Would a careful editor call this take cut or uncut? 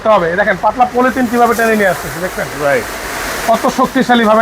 uncut